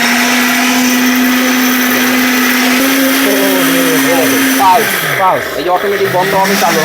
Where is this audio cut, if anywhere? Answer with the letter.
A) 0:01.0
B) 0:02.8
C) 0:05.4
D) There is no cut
B